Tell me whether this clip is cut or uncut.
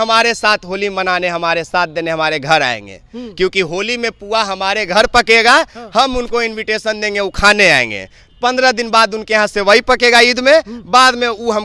uncut